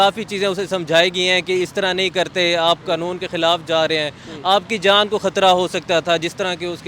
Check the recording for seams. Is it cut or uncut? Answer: uncut